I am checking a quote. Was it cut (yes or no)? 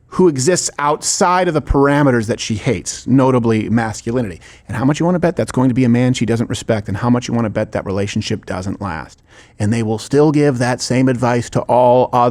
no